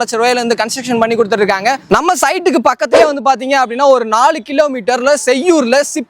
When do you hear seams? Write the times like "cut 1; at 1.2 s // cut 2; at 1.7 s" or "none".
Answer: cut 1; at 1.8 s